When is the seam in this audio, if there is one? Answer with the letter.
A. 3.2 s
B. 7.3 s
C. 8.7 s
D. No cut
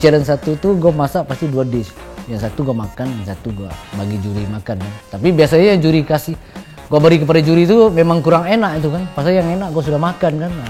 D